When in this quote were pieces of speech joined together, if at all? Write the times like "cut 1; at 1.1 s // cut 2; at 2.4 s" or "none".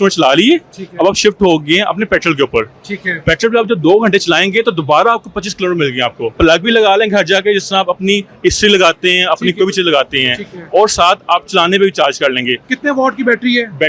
cut 1; at 6.3 s // cut 2; at 12.7 s